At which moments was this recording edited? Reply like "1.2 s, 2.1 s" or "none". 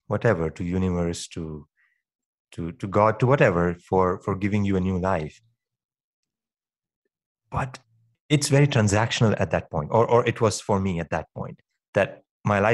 8.2 s